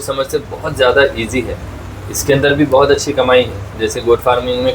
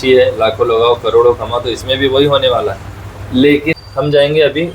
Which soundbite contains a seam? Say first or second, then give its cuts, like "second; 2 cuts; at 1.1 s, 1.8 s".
second; 1 cut; at 3.8 s